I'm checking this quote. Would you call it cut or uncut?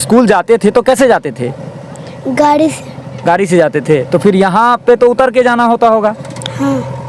uncut